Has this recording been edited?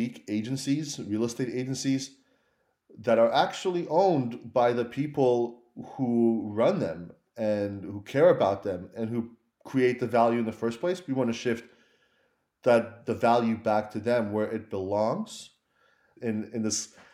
yes; 1 cut; at 16.0 s

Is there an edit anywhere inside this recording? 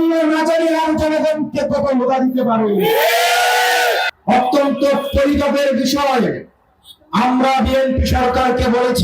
yes; 1 cut; at 4.1 s

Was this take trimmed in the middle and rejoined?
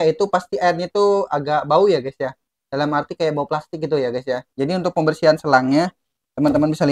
no; 0 cuts

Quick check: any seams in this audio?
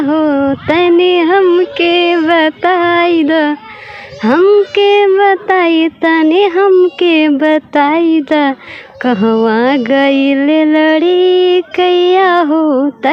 no; 0 cuts

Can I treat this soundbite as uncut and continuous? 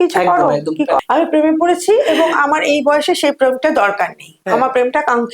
no; 1 cut; at 1.0 s

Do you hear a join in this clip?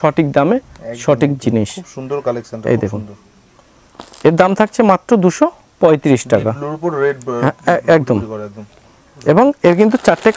no; 0 cuts

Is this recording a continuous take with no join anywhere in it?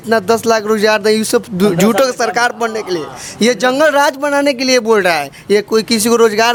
yes; 0 cuts

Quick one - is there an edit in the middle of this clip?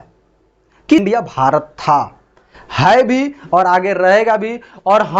yes; 1 cut; at 1.0 s

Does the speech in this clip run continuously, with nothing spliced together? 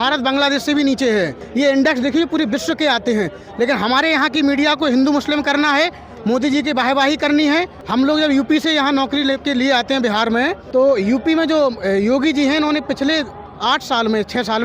no; 3 cuts; at 1.4 s, 7.8 s, 10.6 s

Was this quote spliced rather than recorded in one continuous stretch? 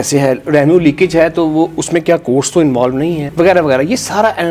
no; 0 cuts

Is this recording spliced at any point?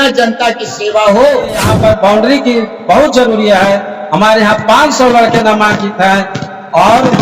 yes; 1 cut; at 1.7 s

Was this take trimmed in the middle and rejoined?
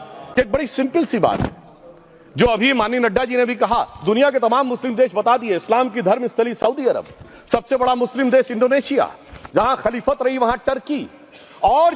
no; 0 cuts

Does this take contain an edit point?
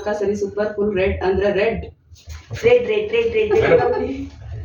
no; 0 cuts

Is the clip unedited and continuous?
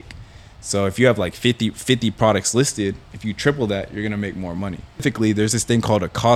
no; 1 cut; at 5.0 s

